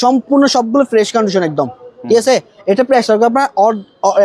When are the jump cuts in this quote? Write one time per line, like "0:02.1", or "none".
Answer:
none